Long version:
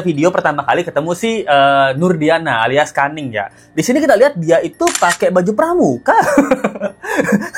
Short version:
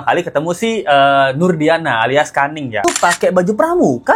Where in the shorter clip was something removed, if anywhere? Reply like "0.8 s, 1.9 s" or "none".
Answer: 2.8 s